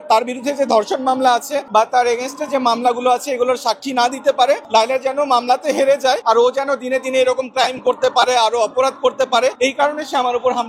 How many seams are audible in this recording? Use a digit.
4